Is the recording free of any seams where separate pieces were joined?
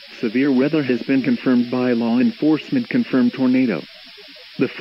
yes; 0 cuts

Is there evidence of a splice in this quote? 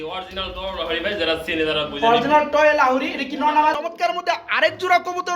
yes; 1 cut; at 3.8 s

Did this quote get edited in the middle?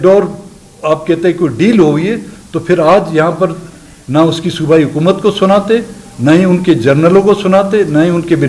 no; 0 cuts

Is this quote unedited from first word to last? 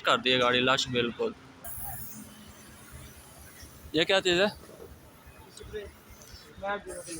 no; 1 cut; at 1.6 s

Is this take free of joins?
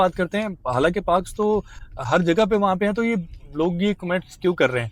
yes; 0 cuts

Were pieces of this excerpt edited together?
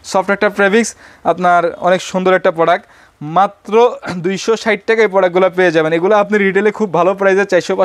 no; 0 cuts

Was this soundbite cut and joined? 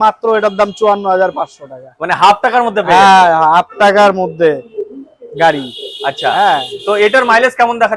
no; 0 cuts

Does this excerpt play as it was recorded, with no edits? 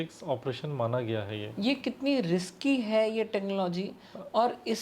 no; 1 cut; at 1.4 s

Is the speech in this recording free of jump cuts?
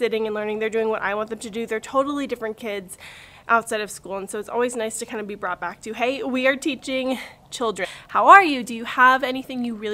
no; 1 cut; at 7.9 s

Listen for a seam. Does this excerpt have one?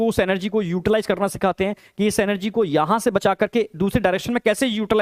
no; 0 cuts

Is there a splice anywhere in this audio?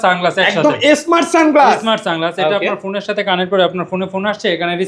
no; 0 cuts

